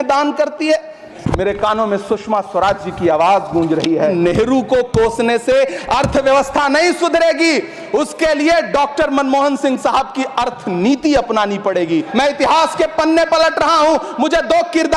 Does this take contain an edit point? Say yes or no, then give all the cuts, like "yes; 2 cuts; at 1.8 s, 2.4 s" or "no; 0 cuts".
yes; 3 cuts; at 1.1 s, 4.1 s, 12.1 s